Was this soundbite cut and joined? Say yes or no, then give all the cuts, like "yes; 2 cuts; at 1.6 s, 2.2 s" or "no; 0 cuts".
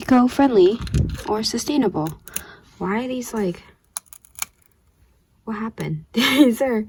no; 0 cuts